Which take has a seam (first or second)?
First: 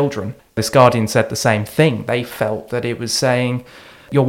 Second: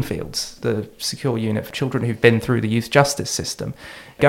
second